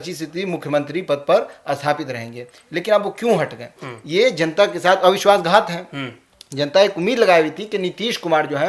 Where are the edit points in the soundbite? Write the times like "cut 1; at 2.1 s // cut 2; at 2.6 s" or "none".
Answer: none